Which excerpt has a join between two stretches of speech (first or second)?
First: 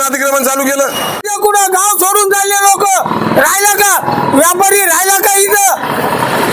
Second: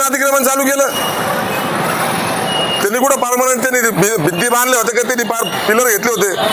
first